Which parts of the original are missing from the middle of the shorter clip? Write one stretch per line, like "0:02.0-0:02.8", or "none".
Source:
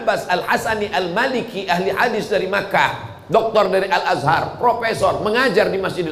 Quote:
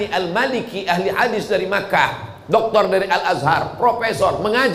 none